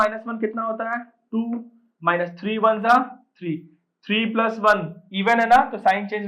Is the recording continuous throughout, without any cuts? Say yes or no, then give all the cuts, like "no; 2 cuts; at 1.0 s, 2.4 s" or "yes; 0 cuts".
yes; 0 cuts